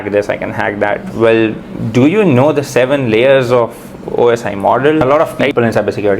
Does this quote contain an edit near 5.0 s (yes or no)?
yes